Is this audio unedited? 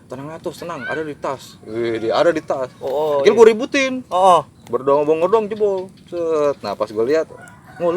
no; 1 cut; at 4.5 s

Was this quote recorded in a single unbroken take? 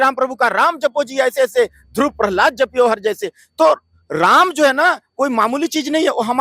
yes; 0 cuts

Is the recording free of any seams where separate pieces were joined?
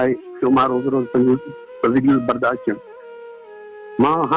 yes; 0 cuts

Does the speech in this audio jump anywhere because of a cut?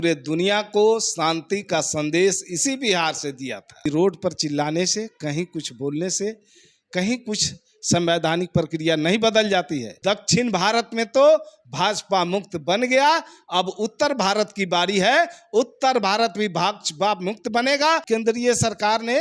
yes; 3 cuts; at 3.8 s, 9.9 s, 18.0 s

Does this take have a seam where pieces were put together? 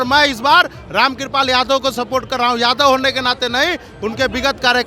no; 0 cuts

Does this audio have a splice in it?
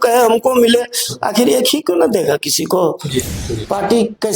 yes; 1 cut; at 3.4 s

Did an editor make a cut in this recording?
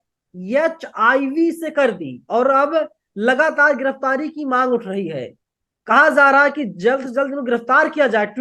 no; 0 cuts

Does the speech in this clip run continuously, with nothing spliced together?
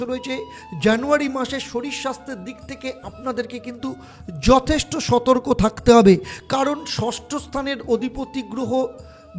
yes; 0 cuts

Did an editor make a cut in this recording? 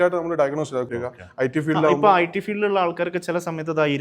yes; 1 cut; at 1.0 s

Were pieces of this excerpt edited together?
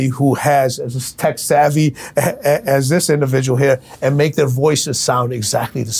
no; 0 cuts

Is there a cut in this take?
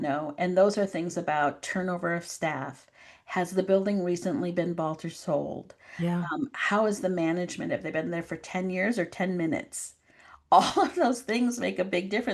no; 0 cuts

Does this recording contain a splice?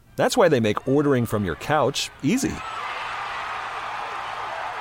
no; 0 cuts

